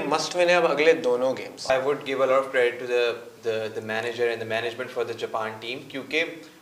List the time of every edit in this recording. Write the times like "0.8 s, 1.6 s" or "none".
1.7 s